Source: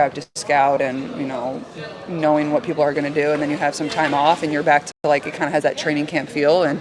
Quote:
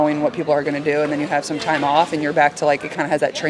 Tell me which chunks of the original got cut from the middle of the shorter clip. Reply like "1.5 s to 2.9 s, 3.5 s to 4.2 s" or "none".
4.9 s to 5.0 s